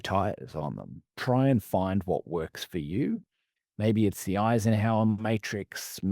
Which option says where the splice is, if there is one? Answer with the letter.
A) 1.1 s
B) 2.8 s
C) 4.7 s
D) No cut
A